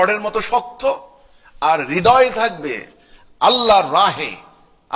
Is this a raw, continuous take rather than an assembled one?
yes; 0 cuts

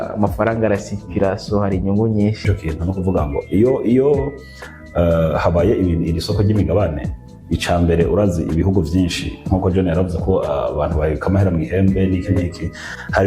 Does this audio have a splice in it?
yes; 1 cut; at 2.4 s

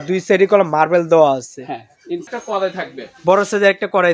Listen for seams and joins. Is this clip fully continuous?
no; 1 cut; at 2.3 s

